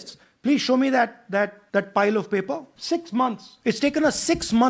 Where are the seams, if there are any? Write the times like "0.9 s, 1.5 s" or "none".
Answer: 1.6 s, 2.7 s, 3.5 s